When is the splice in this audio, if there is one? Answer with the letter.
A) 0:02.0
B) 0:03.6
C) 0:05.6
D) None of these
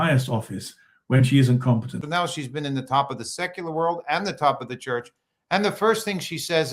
A